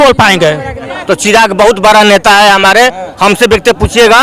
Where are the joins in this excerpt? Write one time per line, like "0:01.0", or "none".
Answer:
0:00.9